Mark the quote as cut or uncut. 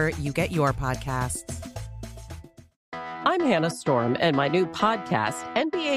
cut